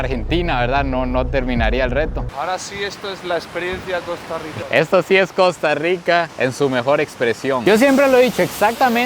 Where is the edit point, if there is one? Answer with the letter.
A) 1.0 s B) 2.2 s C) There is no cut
B